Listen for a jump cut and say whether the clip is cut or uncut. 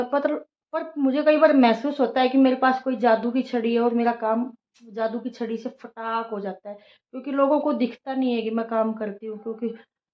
uncut